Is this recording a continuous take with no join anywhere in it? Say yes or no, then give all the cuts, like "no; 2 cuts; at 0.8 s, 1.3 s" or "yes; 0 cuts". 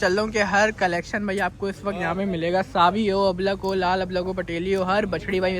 yes; 0 cuts